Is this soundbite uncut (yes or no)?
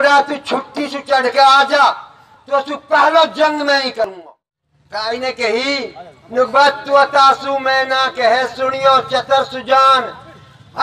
no